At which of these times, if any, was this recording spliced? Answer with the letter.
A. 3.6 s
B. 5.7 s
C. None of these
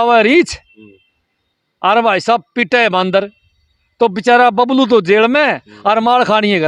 C